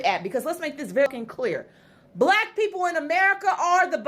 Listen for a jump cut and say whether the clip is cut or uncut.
cut